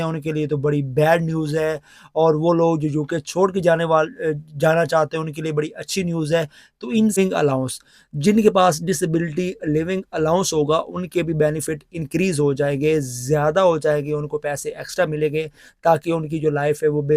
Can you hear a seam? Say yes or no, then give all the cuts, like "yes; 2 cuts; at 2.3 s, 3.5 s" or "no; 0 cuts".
yes; 1 cut; at 7.2 s